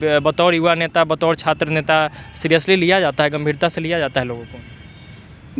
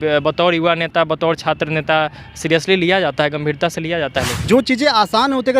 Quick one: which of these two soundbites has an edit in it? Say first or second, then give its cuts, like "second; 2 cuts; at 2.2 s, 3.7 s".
second; 1 cut; at 4.3 s